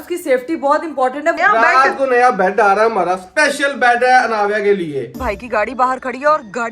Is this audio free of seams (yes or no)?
no